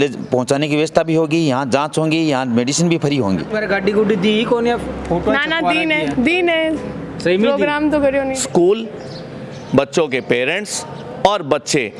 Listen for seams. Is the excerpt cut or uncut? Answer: cut